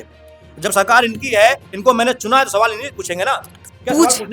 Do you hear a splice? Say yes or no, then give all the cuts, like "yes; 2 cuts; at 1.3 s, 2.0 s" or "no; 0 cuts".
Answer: no; 0 cuts